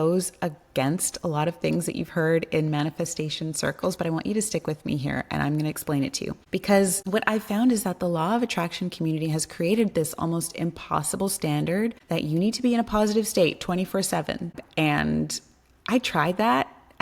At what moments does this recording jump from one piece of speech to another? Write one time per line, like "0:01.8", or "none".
0:06.4
0:07.0
0:12.0
0:14.5